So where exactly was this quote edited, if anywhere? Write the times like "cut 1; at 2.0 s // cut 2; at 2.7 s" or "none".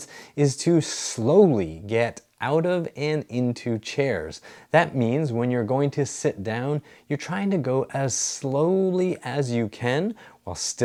none